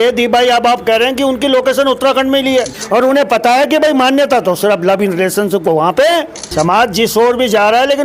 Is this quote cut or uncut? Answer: cut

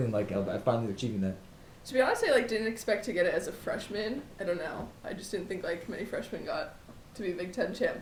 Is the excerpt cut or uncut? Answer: uncut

